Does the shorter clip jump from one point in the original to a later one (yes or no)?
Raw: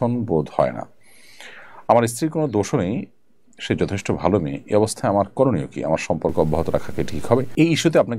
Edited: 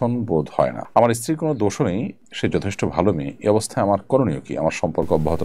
yes